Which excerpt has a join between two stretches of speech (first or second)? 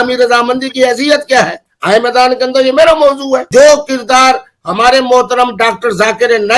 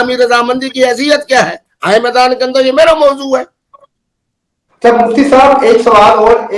first